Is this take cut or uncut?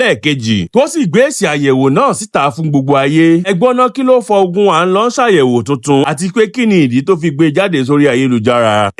uncut